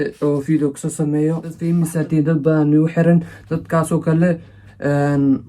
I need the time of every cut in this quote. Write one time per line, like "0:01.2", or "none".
0:01.5